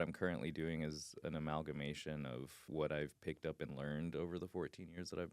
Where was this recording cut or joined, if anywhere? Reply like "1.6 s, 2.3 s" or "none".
2.7 s